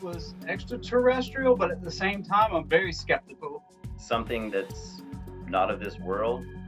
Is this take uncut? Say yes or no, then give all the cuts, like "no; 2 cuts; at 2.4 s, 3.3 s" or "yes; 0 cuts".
yes; 0 cuts